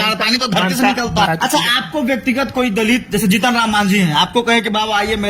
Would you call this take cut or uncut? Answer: cut